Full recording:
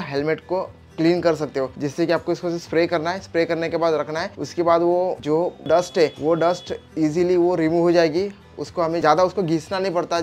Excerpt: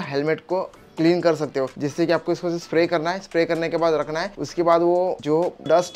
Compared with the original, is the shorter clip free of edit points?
yes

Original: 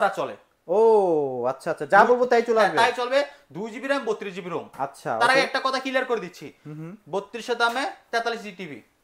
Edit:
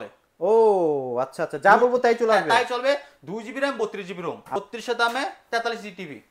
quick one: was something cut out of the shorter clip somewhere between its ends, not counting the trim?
yes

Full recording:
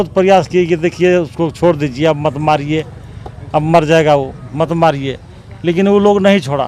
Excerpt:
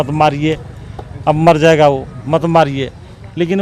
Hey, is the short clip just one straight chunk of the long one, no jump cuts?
yes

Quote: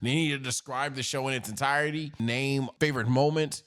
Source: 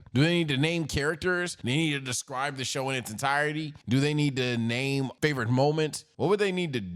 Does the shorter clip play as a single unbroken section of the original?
no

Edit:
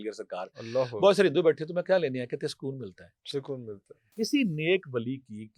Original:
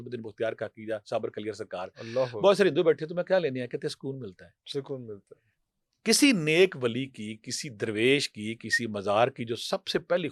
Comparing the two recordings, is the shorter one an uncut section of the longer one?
no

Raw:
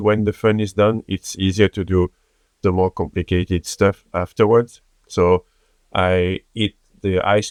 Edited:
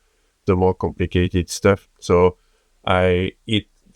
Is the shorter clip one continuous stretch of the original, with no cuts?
no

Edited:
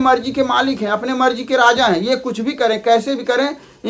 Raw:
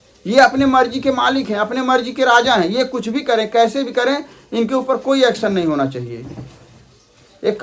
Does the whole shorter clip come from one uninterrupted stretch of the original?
yes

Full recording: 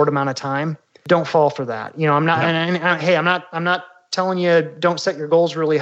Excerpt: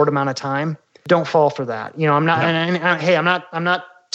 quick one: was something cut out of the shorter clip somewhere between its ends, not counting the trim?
no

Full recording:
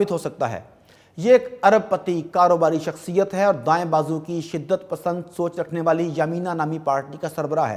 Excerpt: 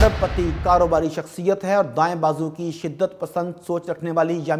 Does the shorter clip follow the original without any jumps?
yes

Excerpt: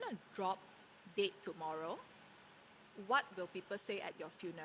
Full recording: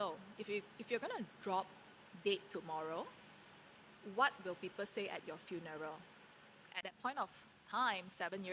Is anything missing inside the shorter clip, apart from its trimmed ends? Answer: no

